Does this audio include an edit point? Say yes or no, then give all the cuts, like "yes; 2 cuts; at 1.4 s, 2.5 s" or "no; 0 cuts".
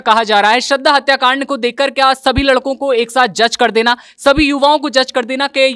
no; 0 cuts